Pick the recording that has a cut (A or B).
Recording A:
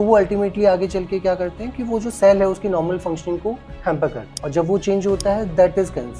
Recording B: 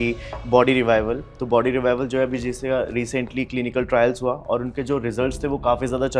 A